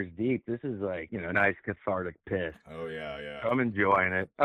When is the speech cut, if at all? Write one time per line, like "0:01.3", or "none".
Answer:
0:01.1